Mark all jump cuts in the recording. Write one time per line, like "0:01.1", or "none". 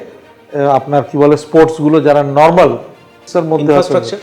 0:03.2